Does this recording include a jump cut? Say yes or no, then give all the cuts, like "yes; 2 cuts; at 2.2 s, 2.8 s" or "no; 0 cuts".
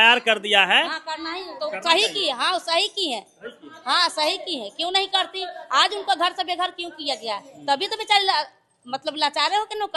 no; 0 cuts